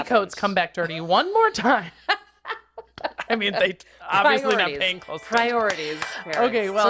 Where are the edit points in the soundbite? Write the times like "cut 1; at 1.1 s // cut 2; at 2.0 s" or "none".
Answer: none